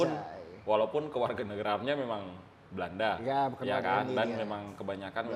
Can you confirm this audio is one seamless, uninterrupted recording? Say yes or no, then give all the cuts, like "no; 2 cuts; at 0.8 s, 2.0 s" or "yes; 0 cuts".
yes; 0 cuts